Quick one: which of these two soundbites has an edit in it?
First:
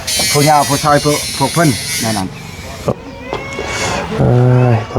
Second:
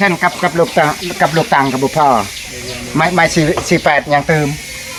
first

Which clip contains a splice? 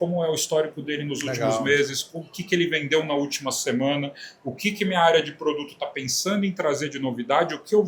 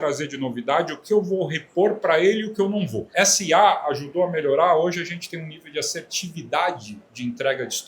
second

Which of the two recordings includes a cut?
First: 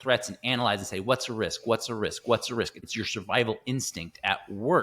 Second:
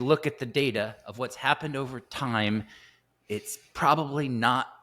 first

